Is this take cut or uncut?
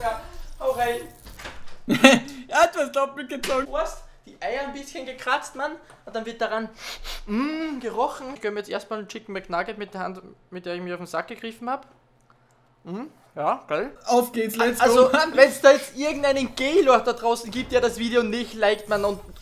cut